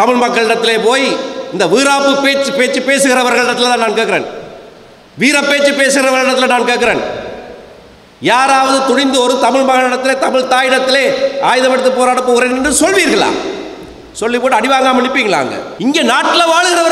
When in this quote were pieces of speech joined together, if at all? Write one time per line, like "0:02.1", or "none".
0:15.6